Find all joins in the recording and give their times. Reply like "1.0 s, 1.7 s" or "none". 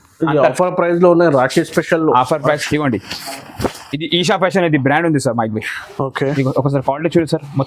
2.6 s